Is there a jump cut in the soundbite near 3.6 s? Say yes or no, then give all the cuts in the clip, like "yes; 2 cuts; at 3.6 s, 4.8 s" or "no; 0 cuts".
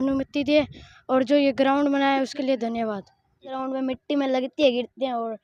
yes; 1 cut; at 3.6 s